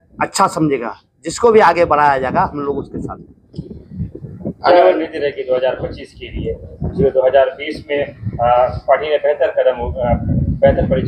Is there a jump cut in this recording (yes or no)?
no